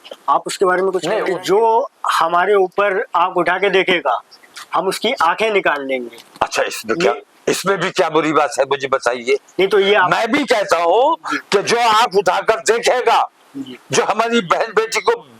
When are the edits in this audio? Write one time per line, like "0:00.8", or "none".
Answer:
0:01.3